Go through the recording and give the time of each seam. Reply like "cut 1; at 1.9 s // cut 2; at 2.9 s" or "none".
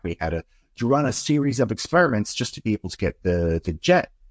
none